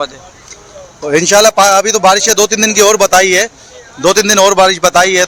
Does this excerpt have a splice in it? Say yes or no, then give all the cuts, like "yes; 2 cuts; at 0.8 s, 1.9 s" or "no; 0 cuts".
no; 0 cuts